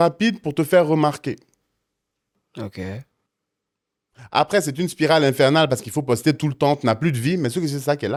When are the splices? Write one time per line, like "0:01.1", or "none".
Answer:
none